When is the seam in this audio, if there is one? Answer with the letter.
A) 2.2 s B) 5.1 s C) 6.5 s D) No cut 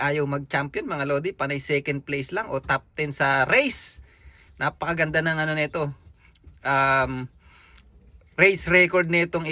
D